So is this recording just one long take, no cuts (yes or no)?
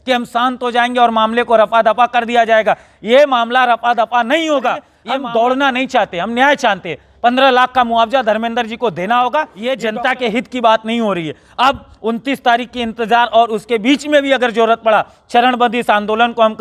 no